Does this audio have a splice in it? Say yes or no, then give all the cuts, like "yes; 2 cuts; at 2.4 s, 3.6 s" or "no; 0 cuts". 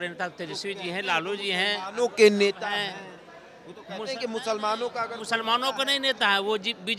no; 0 cuts